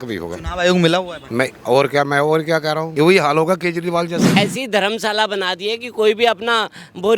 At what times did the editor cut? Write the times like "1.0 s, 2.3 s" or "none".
1.2 s, 2.9 s, 4.3 s